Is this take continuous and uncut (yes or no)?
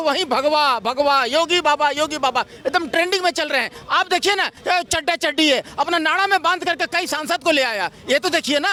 yes